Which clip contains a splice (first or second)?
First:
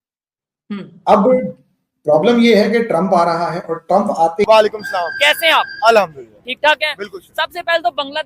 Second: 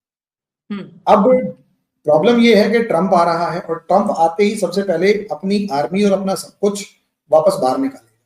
first